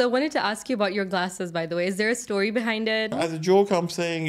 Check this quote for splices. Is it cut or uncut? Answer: cut